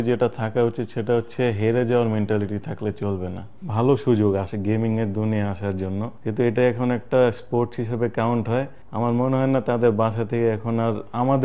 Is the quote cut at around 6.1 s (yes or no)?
yes